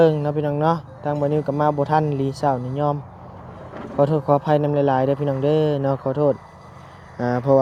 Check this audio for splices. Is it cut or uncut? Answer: uncut